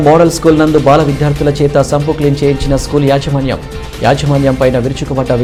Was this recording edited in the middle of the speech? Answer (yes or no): no